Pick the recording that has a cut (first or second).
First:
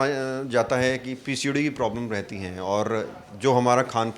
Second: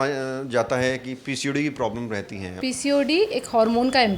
second